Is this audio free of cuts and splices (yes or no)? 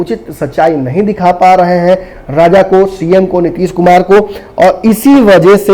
yes